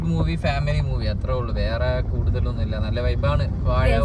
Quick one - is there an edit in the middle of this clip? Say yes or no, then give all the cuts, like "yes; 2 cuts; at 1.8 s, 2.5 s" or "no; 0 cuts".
no; 0 cuts